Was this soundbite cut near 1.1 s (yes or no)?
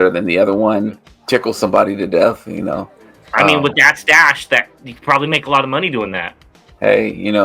yes